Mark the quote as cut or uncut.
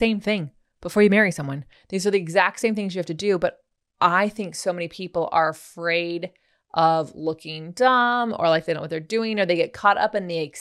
uncut